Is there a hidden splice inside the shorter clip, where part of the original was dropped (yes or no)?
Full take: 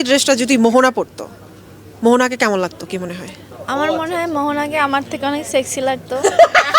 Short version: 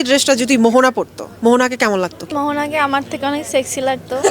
yes